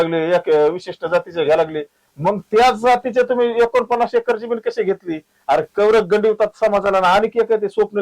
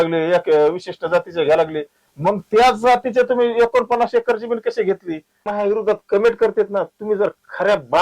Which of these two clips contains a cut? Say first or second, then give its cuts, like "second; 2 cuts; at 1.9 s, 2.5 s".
second; 1 cut; at 5.5 s